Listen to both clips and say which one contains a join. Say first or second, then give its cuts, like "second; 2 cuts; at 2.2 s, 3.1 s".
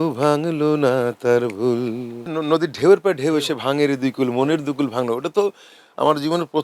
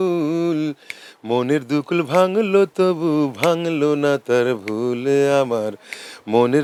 first; 1 cut; at 2.2 s